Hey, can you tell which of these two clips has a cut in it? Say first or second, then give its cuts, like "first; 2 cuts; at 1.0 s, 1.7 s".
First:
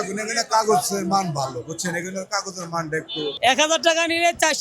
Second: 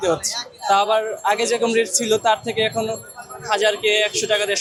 first; 1 cut; at 3.3 s